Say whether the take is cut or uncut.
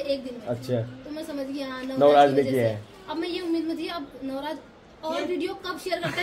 uncut